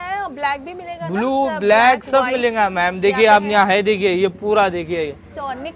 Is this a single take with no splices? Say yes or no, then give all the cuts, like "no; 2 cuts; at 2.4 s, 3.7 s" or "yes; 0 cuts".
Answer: yes; 0 cuts